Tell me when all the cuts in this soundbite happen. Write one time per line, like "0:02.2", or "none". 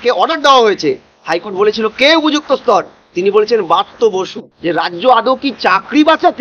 0:04.4